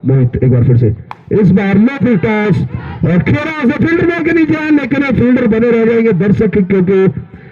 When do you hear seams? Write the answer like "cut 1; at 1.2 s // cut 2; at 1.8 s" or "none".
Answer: none